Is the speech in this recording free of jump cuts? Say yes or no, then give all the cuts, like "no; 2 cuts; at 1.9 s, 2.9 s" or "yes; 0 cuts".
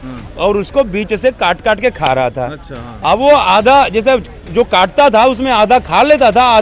yes; 0 cuts